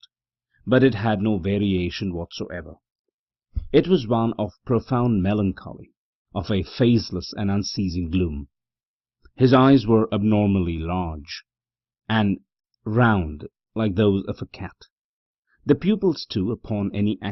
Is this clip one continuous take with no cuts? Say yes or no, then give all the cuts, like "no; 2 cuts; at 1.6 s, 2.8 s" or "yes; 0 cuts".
yes; 0 cuts